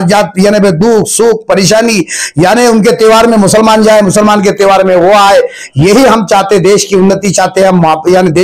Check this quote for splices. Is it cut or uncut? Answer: uncut